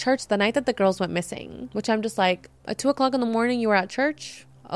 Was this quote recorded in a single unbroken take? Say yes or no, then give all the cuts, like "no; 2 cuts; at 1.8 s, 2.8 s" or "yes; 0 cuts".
yes; 0 cuts